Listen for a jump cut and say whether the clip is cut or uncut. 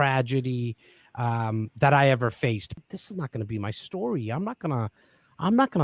cut